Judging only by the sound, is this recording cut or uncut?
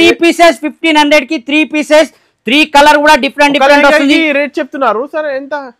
uncut